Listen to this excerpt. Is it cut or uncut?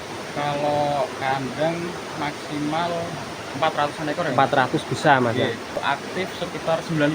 cut